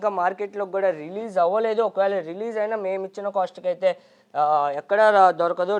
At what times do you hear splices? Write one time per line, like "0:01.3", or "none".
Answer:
none